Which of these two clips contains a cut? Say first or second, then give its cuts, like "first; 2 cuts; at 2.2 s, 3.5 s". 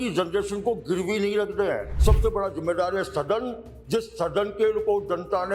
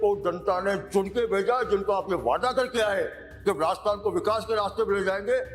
first; 1 cut; at 1.9 s